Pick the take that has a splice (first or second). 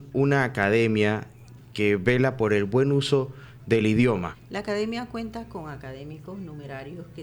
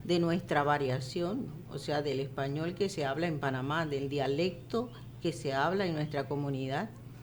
first